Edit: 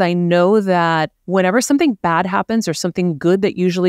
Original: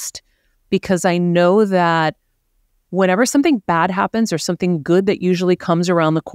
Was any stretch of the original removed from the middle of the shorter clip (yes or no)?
yes